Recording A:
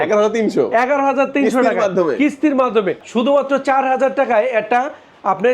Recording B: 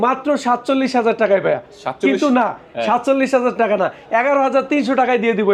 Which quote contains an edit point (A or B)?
A